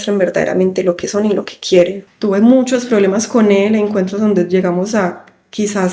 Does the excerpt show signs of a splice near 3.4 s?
no; 1 cut; at 2.0 s

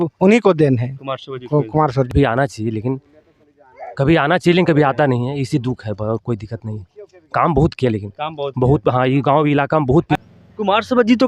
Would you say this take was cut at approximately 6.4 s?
no; 2 cuts; at 2.1 s, 10.2 s

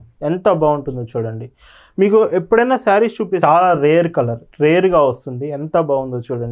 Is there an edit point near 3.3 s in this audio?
yes; 1 cut; at 3.3 s

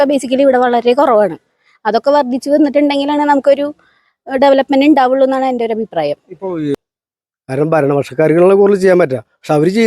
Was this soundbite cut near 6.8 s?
yes; 1 cut; at 6.8 s

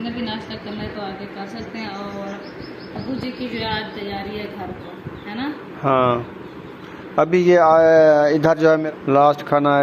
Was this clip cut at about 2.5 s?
no; 1 cut; at 8.8 s

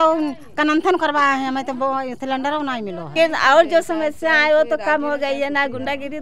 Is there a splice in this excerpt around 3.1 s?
yes; 1 cut; at 3.1 s

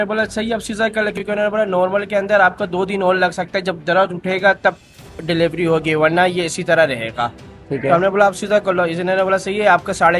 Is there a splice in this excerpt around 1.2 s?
no; 0 cuts

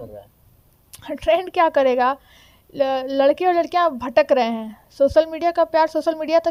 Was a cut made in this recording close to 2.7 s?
no; 0 cuts

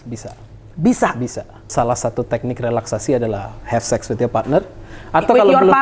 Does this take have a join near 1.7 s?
yes; 1 cut; at 1.7 s

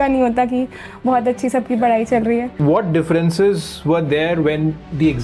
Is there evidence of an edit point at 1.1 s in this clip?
no; 1 cut; at 2.6 s

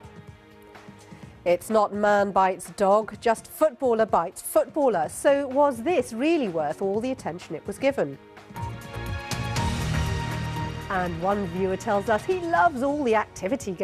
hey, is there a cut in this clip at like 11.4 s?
yes; 1 cut; at 11.4 s

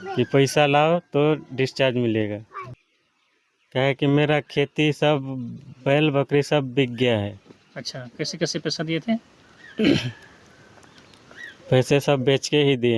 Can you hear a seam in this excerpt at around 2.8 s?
yes; 1 cut; at 2.8 s

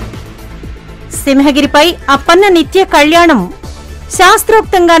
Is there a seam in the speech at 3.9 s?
no; 1 cut; at 1.1 s

